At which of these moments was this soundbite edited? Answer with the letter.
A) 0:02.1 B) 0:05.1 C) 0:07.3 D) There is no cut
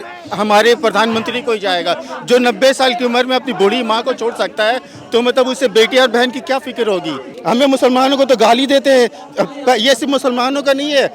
C